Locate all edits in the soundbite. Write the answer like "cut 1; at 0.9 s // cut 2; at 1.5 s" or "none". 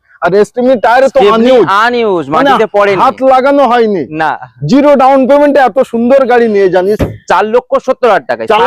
cut 1; at 7.0 s

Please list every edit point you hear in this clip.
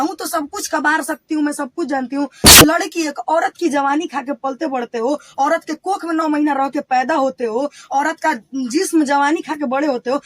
cut 1; at 2.6 s

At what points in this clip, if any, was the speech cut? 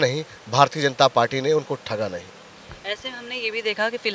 none

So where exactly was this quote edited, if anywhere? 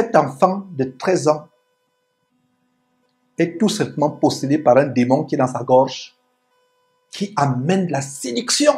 none

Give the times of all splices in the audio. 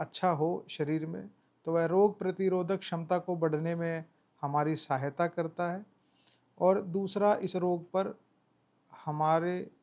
none

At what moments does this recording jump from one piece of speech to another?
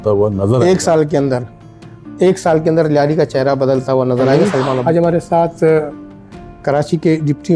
cut 1; at 4.8 s

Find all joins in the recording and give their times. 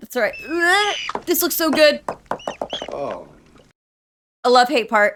none

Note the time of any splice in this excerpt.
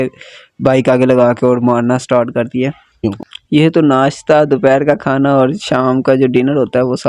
cut 1; at 3.1 s

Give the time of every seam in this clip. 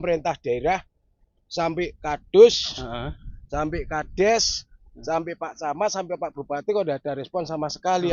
none

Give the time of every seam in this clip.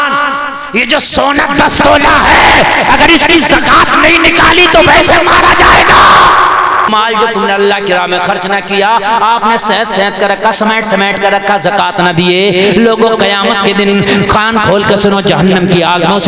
cut 1; at 6.9 s

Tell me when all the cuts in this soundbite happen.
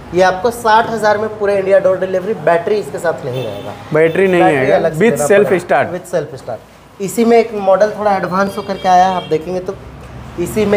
none

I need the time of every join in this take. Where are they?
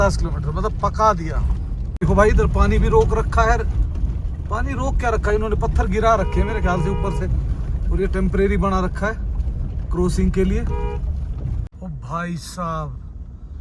cut 1; at 1.8 s // cut 2; at 11.9 s

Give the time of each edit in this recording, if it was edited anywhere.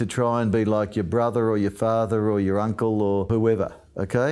cut 1; at 3.3 s

